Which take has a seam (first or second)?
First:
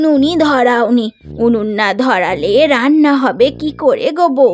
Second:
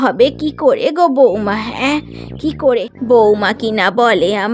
second